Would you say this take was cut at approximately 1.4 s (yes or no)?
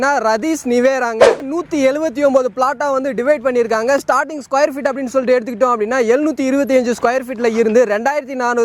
yes